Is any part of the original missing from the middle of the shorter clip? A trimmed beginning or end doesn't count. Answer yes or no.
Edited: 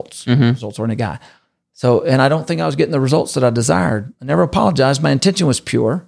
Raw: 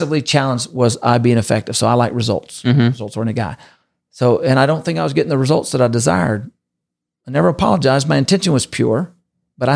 yes